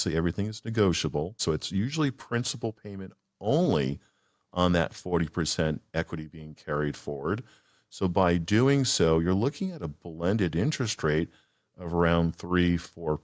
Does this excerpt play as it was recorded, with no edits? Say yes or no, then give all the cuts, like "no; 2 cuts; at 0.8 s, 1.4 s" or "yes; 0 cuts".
no; 1 cut; at 1.4 s